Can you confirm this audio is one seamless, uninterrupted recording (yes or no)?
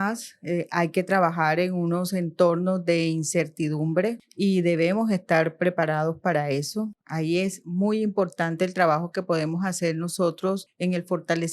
no